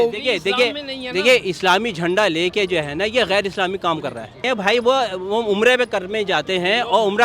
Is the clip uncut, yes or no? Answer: no